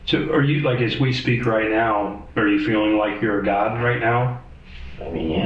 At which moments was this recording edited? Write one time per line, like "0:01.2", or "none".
0:02.2

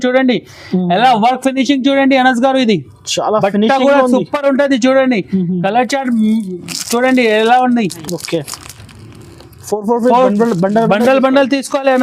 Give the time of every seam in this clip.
none

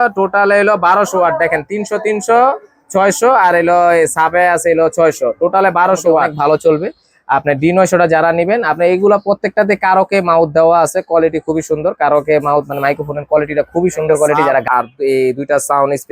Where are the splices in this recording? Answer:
0:06.3
0:14.6

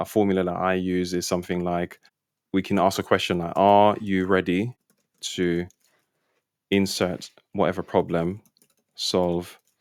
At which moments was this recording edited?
none

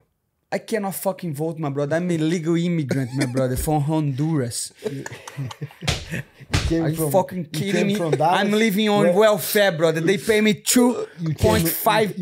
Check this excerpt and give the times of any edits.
none

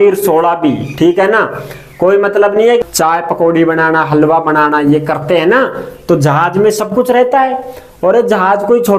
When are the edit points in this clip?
0:02.8

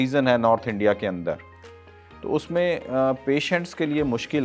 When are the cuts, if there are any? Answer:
none

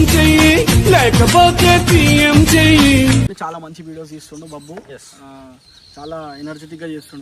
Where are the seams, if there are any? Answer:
0:03.3

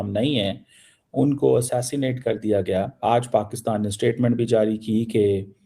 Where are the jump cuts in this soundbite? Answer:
0:03.0

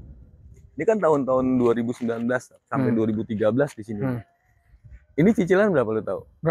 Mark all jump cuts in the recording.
none

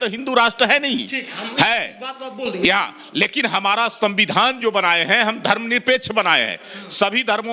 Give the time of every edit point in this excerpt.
none

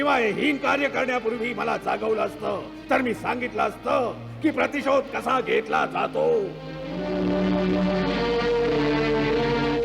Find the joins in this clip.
none

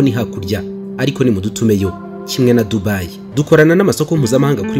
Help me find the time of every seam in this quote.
0:03.2

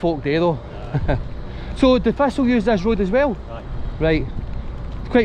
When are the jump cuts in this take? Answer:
none

